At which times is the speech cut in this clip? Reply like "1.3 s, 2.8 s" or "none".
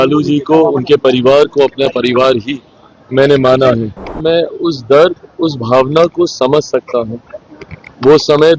4.1 s